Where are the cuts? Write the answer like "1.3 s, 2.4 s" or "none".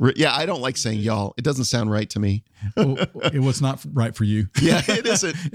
none